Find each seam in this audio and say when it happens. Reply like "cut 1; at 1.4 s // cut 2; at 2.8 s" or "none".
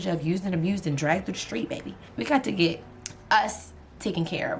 none